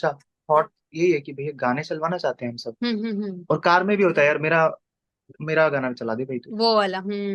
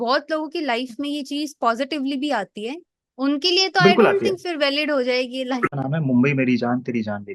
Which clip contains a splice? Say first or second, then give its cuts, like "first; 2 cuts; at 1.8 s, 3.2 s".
second; 1 cut; at 5.7 s